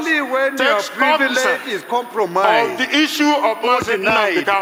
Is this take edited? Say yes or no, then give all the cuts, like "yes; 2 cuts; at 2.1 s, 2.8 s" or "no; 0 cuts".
no; 0 cuts